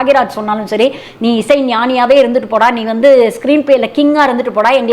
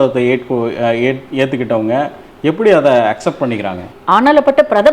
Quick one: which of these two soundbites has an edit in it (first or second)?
second